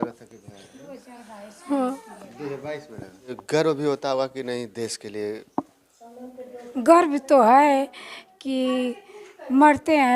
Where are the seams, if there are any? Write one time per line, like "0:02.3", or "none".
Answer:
0:03.3